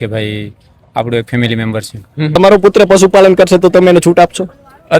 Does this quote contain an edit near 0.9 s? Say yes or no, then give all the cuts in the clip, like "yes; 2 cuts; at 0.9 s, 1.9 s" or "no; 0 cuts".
no; 1 cut; at 2.4 s